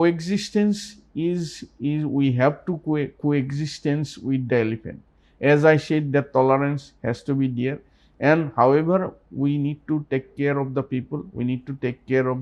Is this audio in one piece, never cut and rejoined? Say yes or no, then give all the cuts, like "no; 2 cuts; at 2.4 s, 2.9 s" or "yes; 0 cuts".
yes; 0 cuts